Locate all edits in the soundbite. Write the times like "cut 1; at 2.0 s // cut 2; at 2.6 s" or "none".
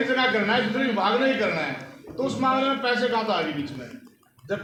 none